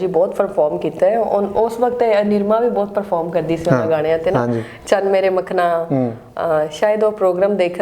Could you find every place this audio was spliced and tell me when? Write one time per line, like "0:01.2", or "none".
none